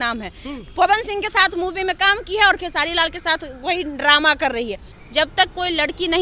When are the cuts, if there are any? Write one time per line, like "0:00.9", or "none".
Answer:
0:04.8